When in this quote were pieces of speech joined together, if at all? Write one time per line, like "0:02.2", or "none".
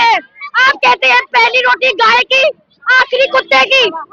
none

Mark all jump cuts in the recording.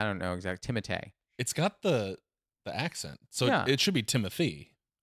0:01.2

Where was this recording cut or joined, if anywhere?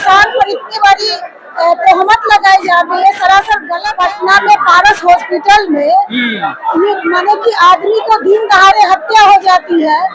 0:03.7

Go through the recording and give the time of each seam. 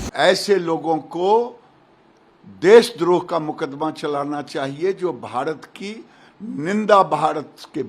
none

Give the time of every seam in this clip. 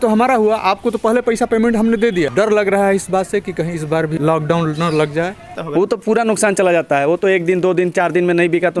0:02.3
0:04.1
0:05.6

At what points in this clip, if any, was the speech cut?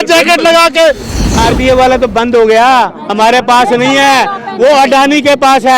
0:01.4

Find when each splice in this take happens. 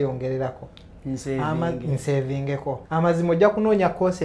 0:02.8

